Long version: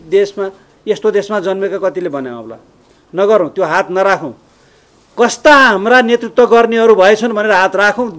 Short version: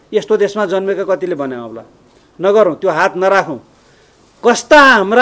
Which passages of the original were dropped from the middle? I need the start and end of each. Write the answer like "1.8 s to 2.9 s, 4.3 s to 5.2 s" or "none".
none